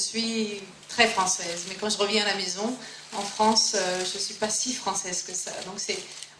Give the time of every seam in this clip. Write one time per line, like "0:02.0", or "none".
0:01.4